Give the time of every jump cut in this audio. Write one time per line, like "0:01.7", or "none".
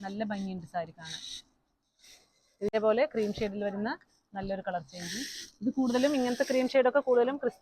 0:02.7